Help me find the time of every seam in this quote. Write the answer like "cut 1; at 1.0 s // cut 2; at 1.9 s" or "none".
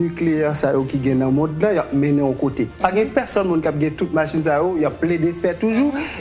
none